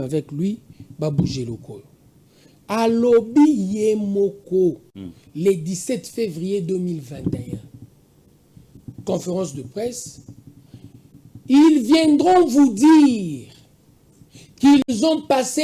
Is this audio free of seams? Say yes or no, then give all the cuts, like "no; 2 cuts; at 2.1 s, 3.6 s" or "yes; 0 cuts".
yes; 0 cuts